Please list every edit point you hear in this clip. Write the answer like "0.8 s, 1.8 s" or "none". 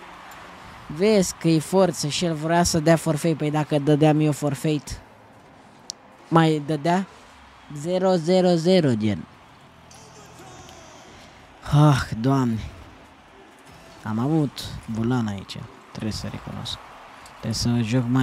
none